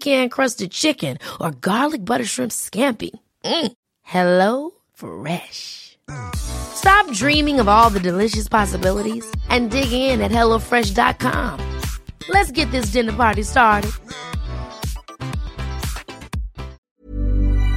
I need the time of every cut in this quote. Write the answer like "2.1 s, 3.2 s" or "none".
16.8 s

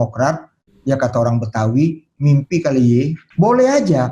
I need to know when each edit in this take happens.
3.2 s

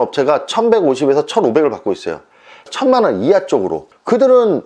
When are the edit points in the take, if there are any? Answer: 2.7 s

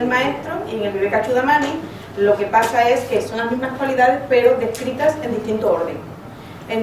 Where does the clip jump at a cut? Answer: 1.1 s

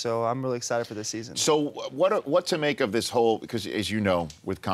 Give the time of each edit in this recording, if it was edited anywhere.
none

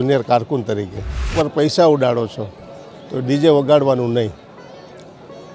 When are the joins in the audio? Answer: 1.3 s

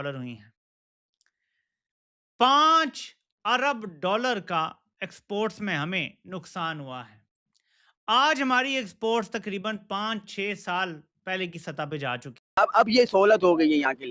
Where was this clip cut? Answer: 12.4 s

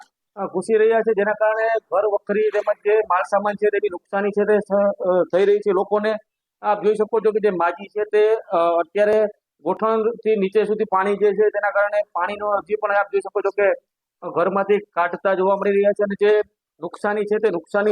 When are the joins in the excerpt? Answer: 14.6 s

